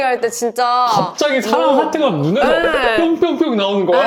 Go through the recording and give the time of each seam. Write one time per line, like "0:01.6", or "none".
none